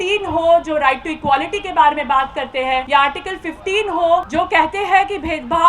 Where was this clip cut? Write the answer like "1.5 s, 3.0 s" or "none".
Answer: 2.9 s, 4.3 s